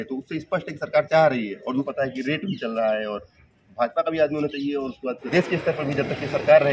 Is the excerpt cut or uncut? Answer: cut